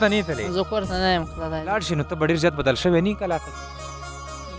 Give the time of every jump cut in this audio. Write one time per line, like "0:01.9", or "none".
0:01.7

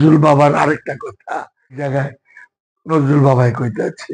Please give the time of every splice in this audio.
0:01.9

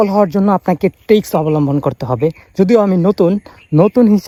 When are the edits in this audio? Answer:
none

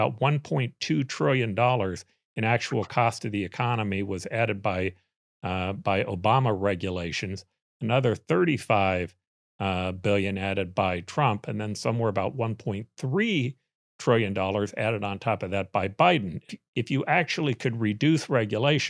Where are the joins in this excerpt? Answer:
0:16.5

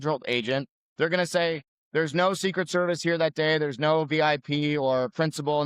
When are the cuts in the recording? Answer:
0:01.7

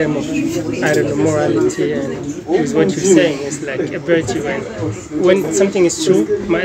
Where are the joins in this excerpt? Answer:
none

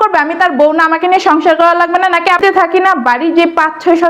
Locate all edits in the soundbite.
0:02.4

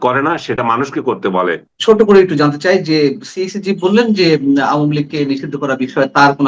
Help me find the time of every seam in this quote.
0:01.7

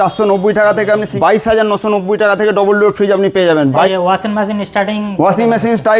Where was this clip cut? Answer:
0:01.1
0:03.9

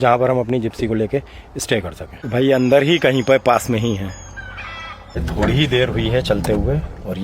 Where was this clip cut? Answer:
0:02.2
0:05.2

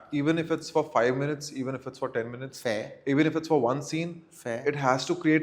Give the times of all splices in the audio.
none

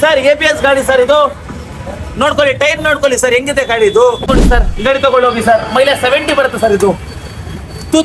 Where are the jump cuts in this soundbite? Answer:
0:04.4

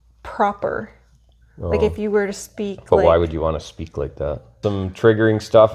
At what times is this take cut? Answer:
0:04.6

